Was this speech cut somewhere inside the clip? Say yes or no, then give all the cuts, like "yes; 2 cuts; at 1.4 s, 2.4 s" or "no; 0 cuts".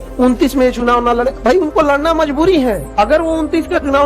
yes; 1 cut; at 2.8 s